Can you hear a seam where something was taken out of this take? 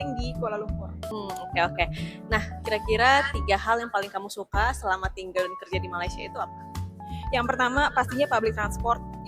yes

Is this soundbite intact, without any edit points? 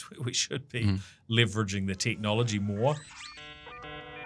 no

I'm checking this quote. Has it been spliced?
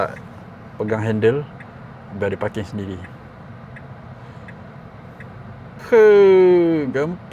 yes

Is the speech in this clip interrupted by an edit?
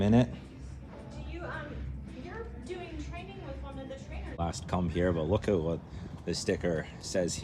yes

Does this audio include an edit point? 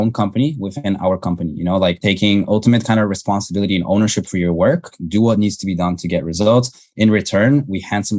yes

